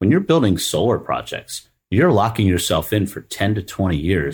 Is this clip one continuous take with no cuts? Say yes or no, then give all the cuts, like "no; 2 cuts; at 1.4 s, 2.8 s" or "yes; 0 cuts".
yes; 0 cuts